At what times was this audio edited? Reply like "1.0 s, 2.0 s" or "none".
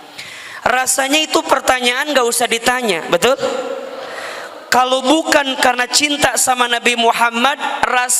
none